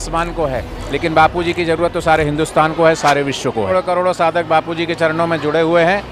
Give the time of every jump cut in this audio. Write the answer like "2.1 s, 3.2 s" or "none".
3.7 s